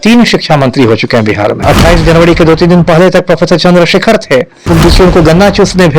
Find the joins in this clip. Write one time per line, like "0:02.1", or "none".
0:01.6
0:04.6